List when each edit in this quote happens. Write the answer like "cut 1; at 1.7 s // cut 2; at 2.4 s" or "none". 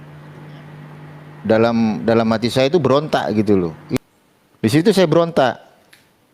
cut 1; at 3.9 s